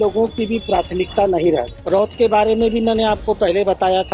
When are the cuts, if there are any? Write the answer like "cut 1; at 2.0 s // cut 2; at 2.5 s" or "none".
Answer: cut 1; at 1.8 s